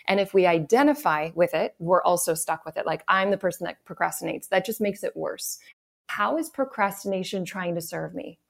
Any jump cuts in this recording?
yes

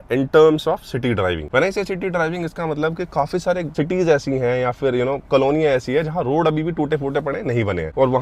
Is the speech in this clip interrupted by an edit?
no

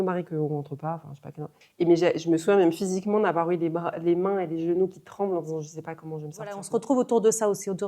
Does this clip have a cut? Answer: yes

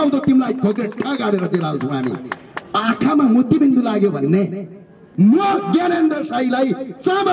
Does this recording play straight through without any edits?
no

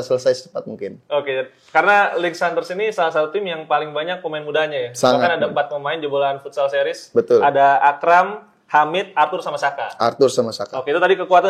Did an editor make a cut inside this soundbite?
no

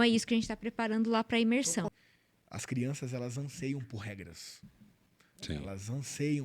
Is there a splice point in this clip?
yes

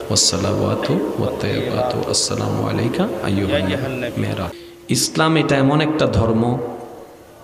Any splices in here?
yes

